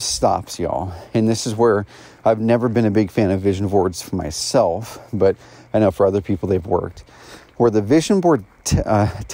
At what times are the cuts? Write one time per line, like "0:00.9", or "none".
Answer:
none